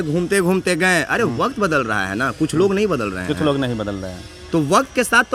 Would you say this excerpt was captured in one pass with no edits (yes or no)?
yes